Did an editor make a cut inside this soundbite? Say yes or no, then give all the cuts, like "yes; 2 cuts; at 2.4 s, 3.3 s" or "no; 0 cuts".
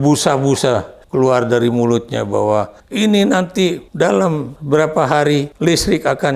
yes; 5 cuts; at 1.0 s, 2.8 s, 3.8 s, 4.5 s, 5.5 s